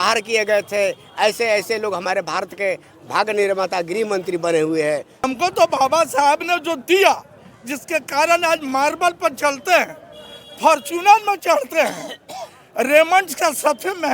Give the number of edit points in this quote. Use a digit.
1